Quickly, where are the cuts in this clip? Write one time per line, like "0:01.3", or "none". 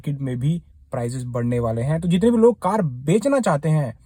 none